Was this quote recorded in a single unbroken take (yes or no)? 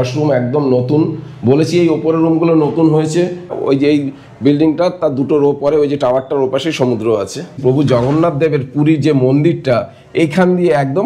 no